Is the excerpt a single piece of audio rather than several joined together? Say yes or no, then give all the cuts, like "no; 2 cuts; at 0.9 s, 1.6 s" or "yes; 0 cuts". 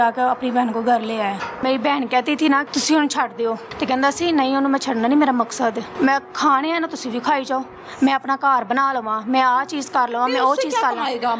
no; 4 cuts; at 1.6 s, 2.7 s, 3.7 s, 5.9 s